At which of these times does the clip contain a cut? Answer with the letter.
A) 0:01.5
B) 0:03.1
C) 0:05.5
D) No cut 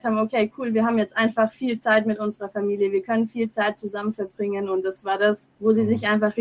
C